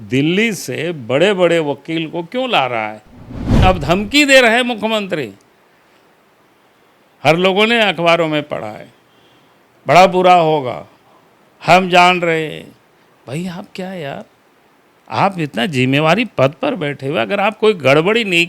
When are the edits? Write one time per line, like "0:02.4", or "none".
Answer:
0:03.6